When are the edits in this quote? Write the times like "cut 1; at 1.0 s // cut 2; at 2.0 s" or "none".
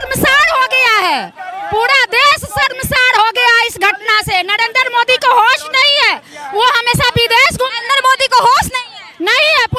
none